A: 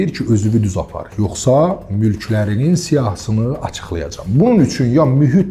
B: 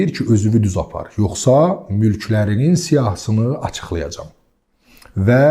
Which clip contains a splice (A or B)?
A